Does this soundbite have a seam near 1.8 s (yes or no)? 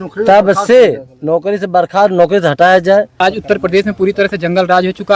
no